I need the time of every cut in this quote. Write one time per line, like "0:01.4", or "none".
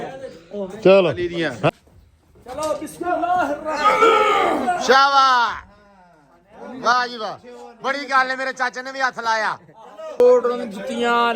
0:01.7
0:10.2